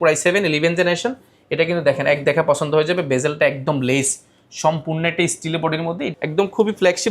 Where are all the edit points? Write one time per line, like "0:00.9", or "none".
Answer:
0:06.0